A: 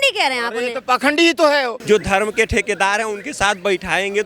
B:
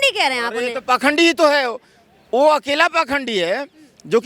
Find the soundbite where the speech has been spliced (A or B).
A